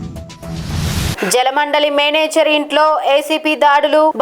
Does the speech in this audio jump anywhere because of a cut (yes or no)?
yes